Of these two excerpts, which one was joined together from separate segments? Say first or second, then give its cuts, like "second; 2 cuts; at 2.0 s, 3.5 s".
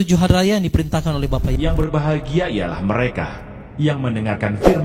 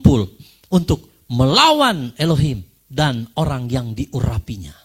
first; 1 cut; at 1.6 s